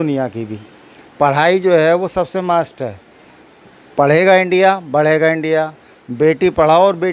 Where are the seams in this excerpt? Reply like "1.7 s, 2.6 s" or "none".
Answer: none